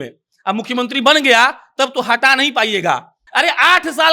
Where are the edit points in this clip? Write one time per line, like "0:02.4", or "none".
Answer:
0:03.2